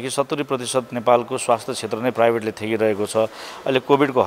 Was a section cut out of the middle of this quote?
no; 0 cuts

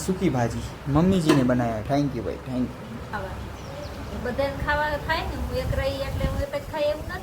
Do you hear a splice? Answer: yes; 1 cut; at 3.1 s

